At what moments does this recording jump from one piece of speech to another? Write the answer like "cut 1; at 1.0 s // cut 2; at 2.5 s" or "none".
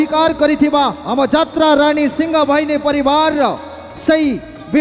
none